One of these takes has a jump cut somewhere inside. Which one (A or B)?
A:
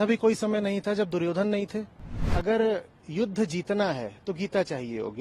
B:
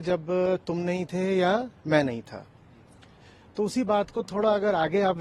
A